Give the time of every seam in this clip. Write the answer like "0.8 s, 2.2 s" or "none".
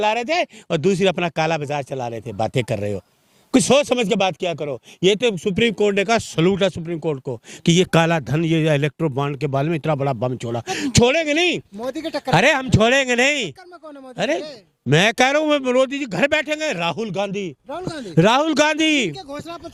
none